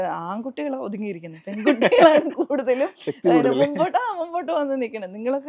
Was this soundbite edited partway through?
no; 0 cuts

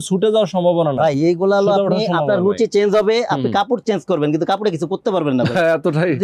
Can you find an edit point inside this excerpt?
no; 0 cuts

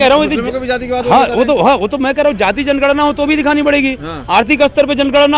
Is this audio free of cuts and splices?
yes; 0 cuts

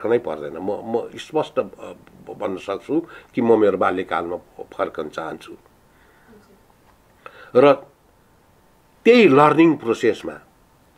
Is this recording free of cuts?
yes; 0 cuts

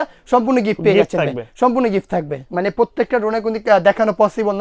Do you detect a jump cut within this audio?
no; 0 cuts

